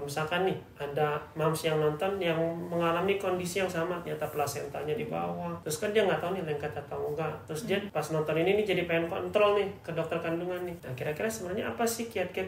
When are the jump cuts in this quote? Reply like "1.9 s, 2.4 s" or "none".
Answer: 5.6 s, 7.9 s, 10.8 s

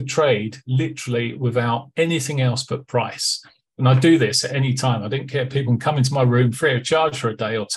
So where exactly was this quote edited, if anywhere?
none

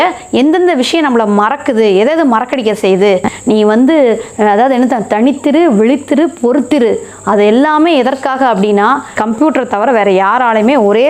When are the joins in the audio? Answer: 3.3 s, 9.1 s

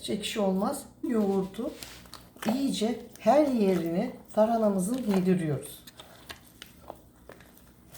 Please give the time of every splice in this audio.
1.1 s

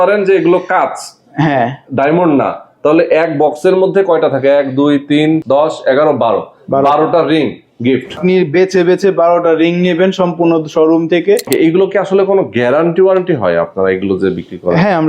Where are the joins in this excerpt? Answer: 5.4 s, 8.2 s, 11.5 s

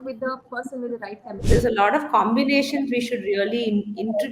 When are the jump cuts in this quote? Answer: 1.4 s

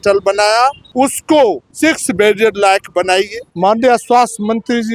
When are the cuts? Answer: 0.8 s, 1.7 s, 3.4 s

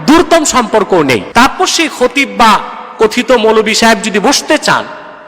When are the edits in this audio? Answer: 1.3 s

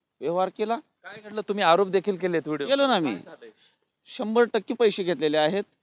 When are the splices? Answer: none

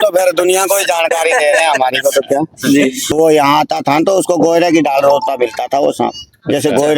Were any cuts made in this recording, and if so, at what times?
3.0 s

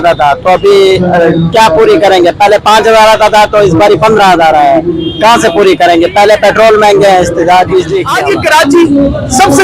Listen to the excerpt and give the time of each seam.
8.1 s

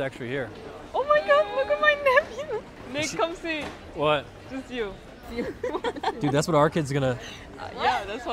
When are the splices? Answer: 2.8 s, 5.3 s

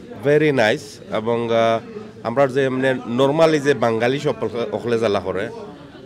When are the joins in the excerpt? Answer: none

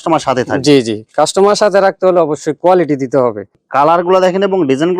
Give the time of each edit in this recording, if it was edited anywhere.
3.5 s

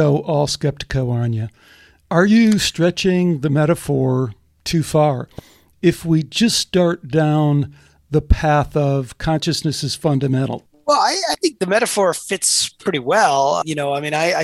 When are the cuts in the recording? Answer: 10.6 s, 13.6 s

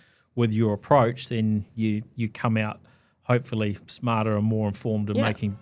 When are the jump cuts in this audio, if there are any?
1.7 s

